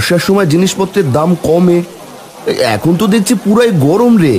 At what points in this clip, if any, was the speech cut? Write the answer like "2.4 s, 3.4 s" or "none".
none

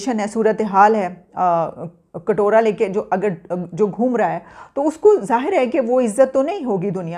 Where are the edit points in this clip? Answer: none

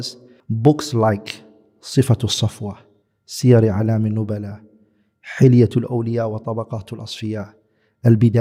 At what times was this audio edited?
none

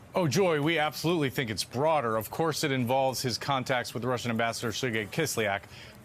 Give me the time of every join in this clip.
2.5 s

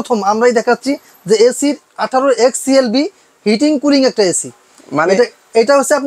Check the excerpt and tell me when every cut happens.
none

